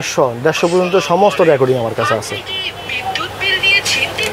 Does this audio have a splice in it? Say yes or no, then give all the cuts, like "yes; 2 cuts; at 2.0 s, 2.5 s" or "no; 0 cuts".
no; 0 cuts